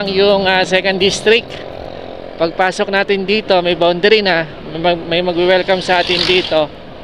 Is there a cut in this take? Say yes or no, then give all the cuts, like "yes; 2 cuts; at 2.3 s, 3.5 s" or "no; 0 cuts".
no; 0 cuts